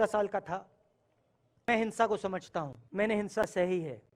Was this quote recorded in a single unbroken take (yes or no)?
no